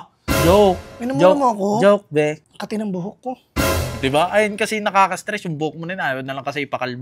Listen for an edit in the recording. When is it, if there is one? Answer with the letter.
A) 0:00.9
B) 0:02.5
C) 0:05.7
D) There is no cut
B